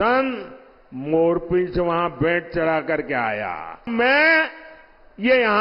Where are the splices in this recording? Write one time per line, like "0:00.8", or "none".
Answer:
0:03.9